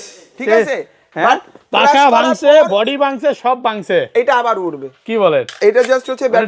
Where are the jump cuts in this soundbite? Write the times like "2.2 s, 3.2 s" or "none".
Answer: none